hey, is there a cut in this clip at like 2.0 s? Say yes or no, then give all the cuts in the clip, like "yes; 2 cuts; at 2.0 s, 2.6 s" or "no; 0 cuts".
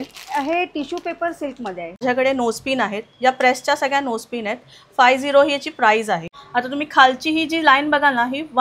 yes; 2 cuts; at 2.0 s, 6.3 s